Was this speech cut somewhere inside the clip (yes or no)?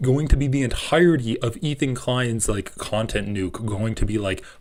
no